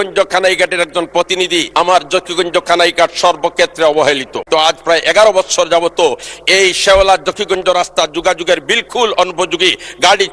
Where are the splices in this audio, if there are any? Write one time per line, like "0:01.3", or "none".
0:01.7
0:04.3